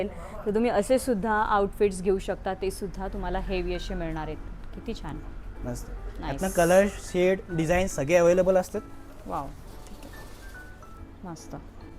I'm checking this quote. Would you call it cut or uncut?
uncut